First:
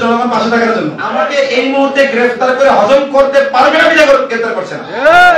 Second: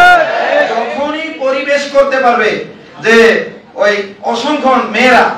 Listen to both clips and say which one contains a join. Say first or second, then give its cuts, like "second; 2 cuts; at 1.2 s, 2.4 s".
first; 1 cut; at 1.2 s